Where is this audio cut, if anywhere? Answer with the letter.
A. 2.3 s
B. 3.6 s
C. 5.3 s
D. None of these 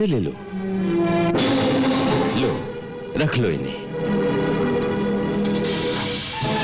A